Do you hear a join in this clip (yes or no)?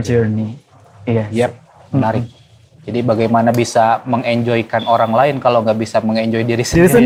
no